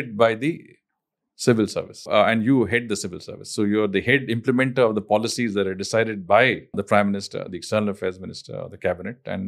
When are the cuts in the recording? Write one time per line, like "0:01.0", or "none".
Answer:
0:02.1
0:06.8